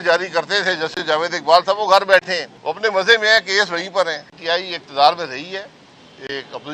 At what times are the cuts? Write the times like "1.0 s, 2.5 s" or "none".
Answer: 2.5 s, 4.3 s